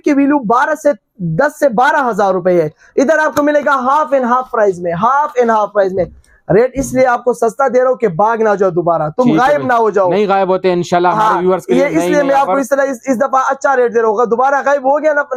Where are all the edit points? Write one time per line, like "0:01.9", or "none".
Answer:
none